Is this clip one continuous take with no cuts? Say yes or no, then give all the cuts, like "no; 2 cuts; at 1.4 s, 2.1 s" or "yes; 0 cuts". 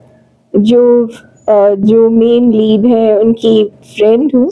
yes; 0 cuts